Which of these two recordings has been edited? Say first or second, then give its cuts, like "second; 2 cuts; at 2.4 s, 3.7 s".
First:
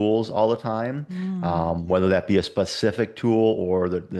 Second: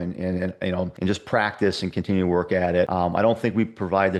second; 2 cuts; at 0.9 s, 2.9 s